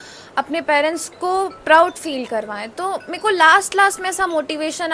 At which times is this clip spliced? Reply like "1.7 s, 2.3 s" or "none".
none

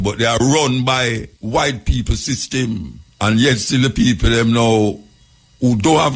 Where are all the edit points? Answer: 1.3 s, 3.0 s

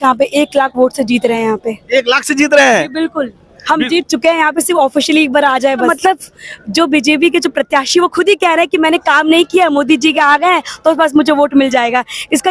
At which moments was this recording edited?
5.9 s

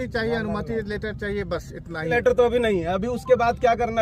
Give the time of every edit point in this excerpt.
2.1 s

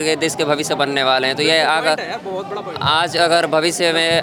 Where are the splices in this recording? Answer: none

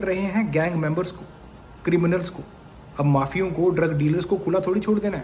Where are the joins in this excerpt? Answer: none

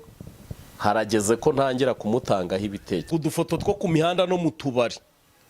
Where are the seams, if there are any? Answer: 3.1 s

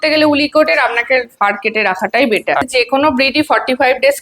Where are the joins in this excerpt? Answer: 2.6 s

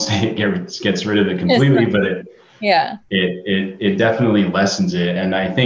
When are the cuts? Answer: none

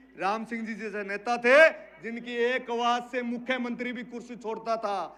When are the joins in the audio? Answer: none

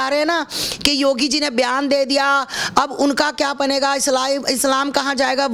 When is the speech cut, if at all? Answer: none

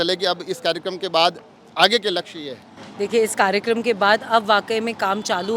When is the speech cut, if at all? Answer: none

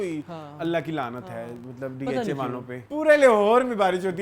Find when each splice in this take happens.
2.8 s

